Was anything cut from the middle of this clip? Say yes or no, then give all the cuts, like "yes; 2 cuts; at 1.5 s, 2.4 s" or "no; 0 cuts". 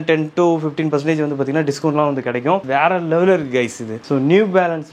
yes; 1 cut; at 2.6 s